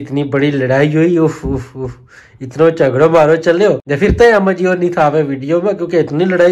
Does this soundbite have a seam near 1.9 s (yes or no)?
no